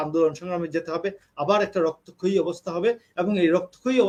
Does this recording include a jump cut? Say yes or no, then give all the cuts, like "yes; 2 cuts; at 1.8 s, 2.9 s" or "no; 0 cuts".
no; 0 cuts